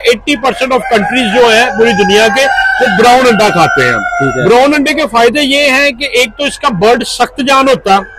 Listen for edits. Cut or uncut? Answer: uncut